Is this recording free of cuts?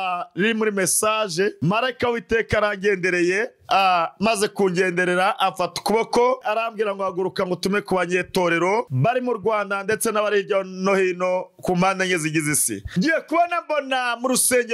no; 2 cuts; at 6.4 s, 12.9 s

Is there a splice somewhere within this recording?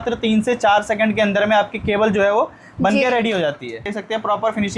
yes; 1 cut; at 3.9 s

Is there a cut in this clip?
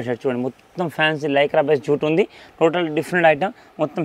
no; 0 cuts

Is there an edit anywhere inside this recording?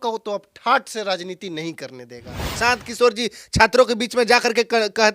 yes; 1 cut; at 2.6 s

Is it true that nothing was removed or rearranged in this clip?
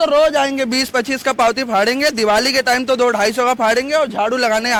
yes; 0 cuts

